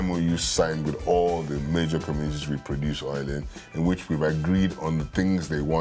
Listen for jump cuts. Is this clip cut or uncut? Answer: uncut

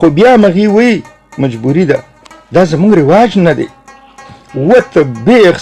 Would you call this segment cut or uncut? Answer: uncut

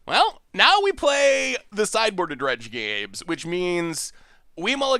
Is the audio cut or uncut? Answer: uncut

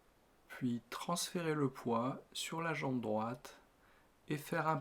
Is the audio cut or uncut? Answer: uncut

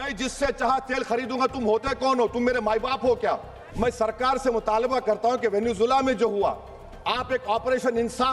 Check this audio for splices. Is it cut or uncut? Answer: cut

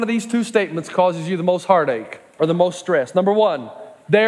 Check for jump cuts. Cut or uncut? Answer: cut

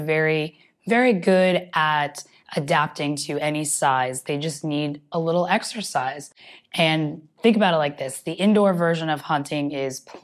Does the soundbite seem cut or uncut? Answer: uncut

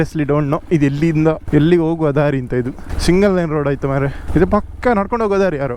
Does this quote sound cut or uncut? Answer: cut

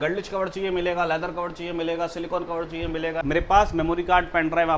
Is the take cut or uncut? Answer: cut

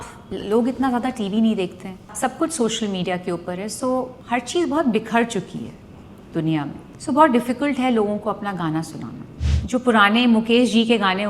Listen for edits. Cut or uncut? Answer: cut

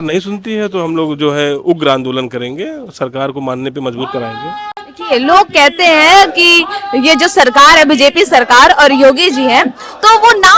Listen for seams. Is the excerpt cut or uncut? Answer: uncut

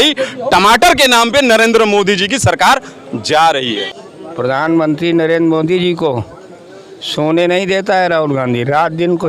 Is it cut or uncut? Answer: cut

